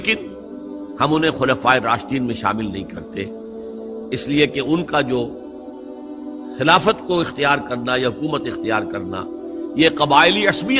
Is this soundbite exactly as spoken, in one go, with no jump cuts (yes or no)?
yes